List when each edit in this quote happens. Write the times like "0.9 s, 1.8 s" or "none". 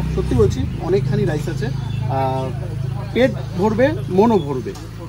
none